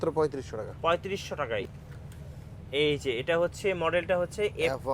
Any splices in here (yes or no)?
yes